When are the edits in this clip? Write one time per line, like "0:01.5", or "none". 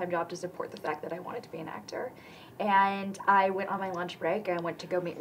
none